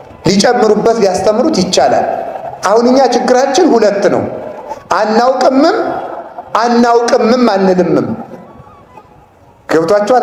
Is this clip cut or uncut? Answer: uncut